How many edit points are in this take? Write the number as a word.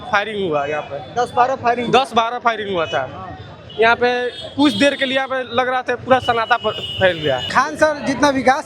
one